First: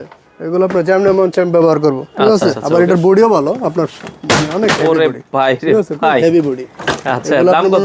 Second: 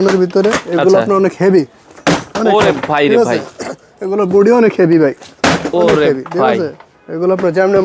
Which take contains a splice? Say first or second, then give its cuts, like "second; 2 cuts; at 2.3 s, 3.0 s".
first; 1 cut; at 2.6 s